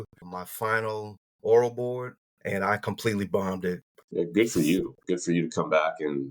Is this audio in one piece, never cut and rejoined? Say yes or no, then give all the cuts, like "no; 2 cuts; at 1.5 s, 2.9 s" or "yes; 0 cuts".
no; 1 cut; at 3.9 s